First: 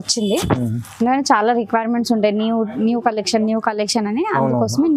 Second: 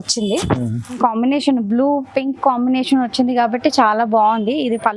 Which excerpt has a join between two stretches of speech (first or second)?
second